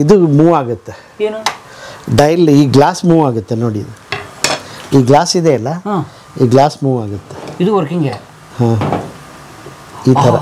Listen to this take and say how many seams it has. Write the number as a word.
zero